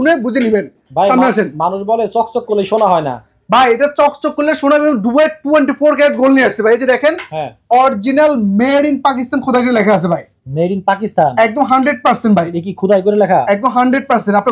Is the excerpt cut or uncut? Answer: uncut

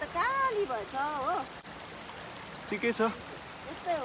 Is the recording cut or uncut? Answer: cut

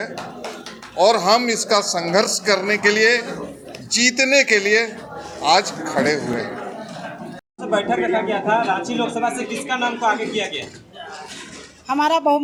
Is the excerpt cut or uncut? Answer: uncut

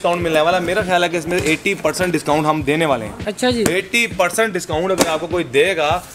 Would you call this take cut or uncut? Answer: uncut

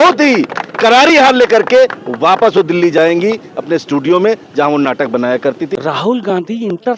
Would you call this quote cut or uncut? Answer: cut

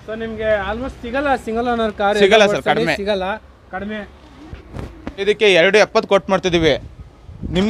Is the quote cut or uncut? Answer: cut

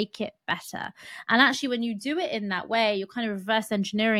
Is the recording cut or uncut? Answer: uncut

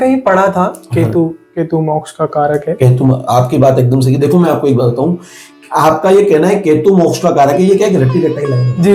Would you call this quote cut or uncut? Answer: uncut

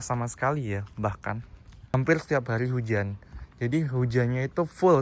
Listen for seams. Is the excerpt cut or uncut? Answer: cut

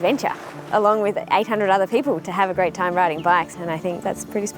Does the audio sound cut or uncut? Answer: cut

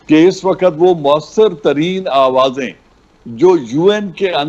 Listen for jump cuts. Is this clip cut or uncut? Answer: uncut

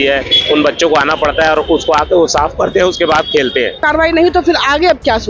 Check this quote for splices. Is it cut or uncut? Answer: cut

